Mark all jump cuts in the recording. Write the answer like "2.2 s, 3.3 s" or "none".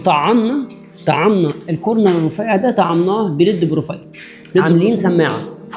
4.6 s